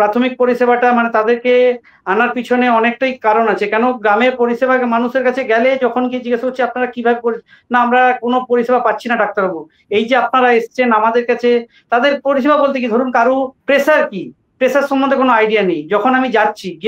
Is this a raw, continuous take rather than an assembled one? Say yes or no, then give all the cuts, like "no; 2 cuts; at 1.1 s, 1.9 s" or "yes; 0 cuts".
no; 1 cut; at 13.6 s